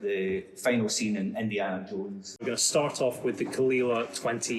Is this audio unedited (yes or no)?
no